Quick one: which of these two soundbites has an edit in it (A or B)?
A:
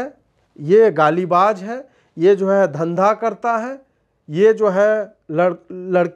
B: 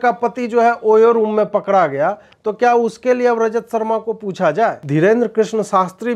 B